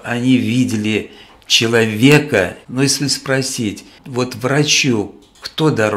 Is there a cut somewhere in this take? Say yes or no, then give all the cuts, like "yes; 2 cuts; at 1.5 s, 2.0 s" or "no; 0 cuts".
yes; 2 cuts; at 2.6 s, 3.9 s